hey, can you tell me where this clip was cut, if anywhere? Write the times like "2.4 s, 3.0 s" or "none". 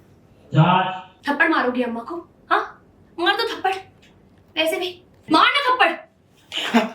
1.1 s, 5.1 s